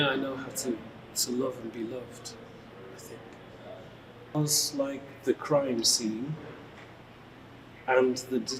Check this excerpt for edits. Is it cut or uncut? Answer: cut